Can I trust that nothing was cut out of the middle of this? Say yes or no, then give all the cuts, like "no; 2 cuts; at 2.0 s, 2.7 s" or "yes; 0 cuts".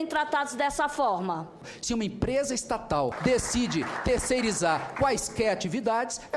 no; 2 cuts; at 1.5 s, 3.2 s